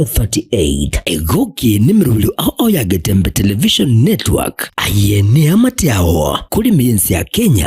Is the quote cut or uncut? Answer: cut